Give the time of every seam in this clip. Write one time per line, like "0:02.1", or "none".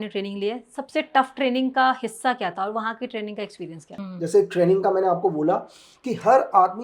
0:03.9